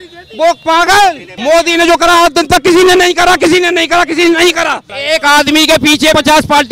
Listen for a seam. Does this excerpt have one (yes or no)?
yes